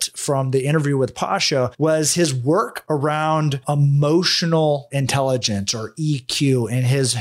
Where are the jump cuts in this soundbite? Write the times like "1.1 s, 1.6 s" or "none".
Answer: 4.9 s